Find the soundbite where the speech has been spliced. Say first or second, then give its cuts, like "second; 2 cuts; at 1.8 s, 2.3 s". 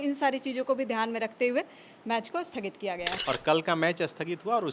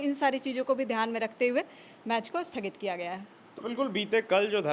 first; 1 cut; at 3.2 s